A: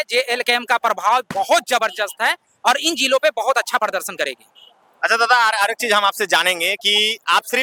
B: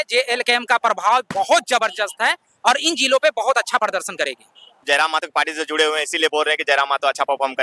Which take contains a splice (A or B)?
B